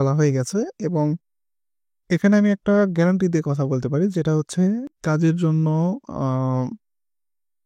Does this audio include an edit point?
yes; 1 cut; at 4.9 s

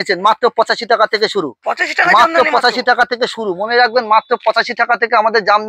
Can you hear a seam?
no; 0 cuts

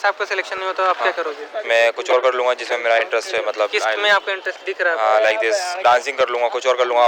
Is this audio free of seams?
yes; 0 cuts

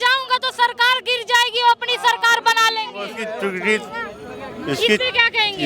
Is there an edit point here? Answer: no; 0 cuts

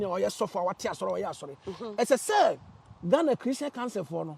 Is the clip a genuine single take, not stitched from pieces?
yes; 0 cuts

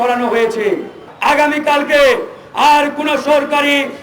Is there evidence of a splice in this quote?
yes; 1 cut; at 1.0 s

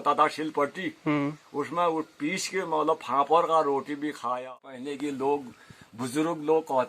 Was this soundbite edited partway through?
yes; 1 cut; at 4.6 s

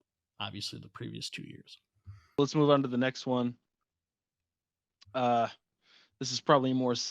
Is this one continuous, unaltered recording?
no; 1 cut; at 2.4 s

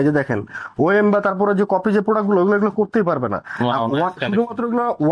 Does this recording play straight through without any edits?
yes; 0 cuts

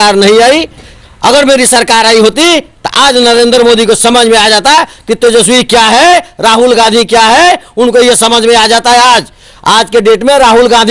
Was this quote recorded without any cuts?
yes; 0 cuts

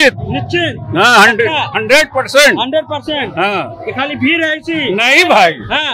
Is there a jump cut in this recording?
no; 0 cuts

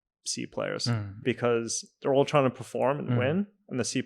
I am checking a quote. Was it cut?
yes; 1 cut; at 1.1 s

